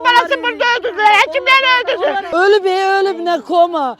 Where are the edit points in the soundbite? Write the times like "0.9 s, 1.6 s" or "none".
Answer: 2.2 s